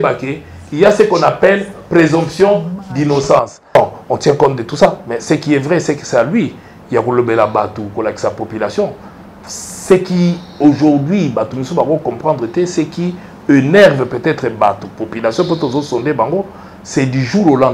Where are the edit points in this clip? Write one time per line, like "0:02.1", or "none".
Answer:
0:03.8